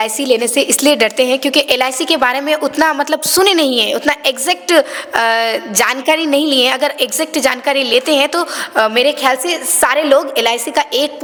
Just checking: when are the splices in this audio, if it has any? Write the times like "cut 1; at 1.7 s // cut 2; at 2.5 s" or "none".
none